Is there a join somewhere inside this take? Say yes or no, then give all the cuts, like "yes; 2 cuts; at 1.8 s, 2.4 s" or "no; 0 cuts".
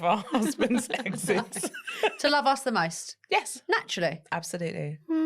no; 0 cuts